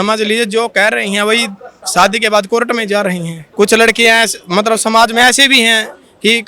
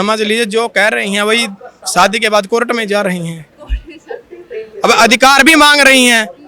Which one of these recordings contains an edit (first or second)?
first